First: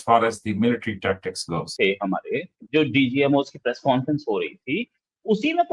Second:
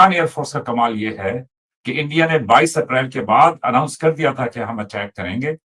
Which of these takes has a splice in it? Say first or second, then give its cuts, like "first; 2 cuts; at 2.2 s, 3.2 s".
first; 1 cut; at 1.7 s